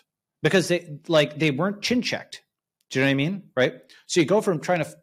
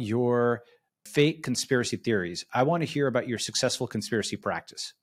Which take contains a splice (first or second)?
second